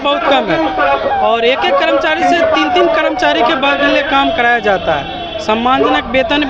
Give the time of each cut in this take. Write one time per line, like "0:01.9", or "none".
none